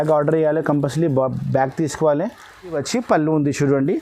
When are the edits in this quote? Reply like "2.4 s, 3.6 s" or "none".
2.8 s

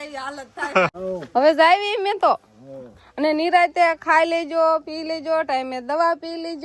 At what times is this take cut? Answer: 1.0 s

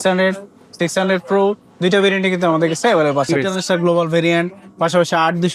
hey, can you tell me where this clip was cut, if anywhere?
3.3 s

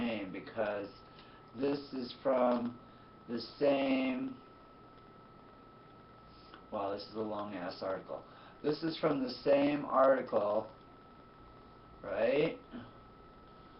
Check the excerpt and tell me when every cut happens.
none

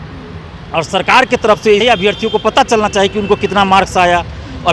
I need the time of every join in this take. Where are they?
1.8 s

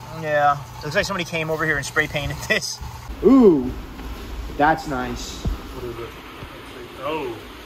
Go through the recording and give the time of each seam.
3.0 s

